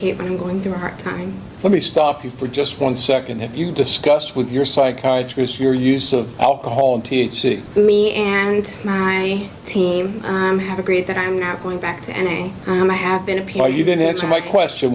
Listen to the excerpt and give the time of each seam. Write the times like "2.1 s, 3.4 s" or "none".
1.5 s, 6.3 s, 7.6 s, 12.6 s